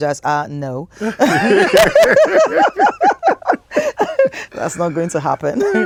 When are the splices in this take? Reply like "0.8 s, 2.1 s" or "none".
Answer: none